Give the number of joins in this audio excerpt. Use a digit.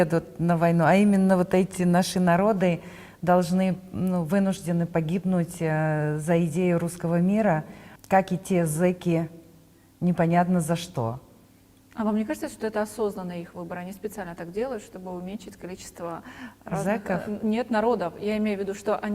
0